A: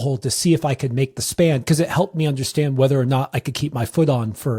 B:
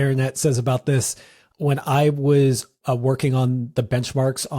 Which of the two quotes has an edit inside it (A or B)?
B